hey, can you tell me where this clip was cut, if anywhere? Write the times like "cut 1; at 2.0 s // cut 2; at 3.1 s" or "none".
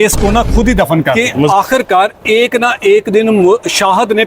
cut 1; at 1.5 s